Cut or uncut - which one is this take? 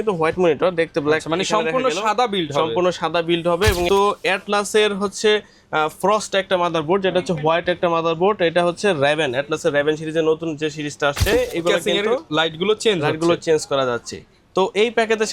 cut